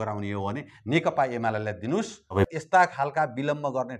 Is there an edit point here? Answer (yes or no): yes